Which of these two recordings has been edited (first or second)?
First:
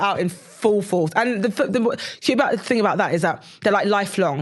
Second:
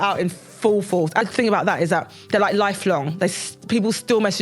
second